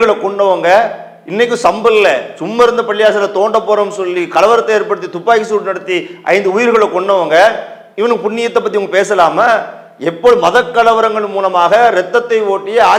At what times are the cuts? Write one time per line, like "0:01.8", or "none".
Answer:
none

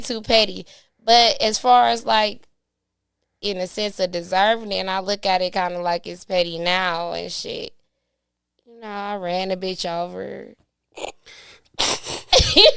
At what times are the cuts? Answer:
none

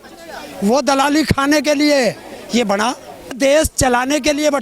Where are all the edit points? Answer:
0:03.3

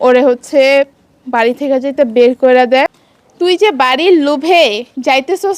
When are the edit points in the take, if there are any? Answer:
0:02.9

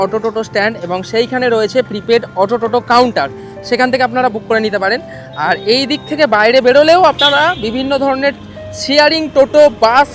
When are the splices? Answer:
none

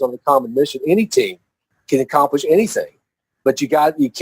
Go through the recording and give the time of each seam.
0:01.7

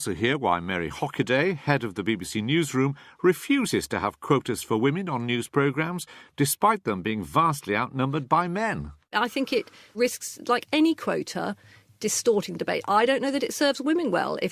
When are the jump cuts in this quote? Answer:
0:02.3

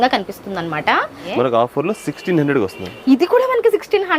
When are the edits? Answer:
0:01.2

